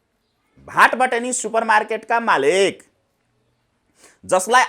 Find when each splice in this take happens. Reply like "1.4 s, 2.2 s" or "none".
none